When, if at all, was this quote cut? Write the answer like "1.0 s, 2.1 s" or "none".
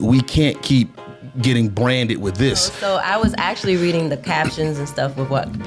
2.8 s